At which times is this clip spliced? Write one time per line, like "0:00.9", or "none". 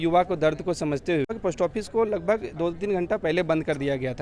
0:01.3